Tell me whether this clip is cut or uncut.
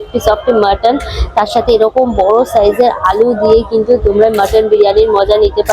uncut